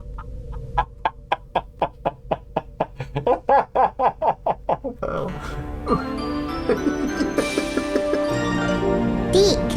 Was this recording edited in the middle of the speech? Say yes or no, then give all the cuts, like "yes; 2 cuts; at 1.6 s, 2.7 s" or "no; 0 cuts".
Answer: yes; 1 cut; at 5.0 s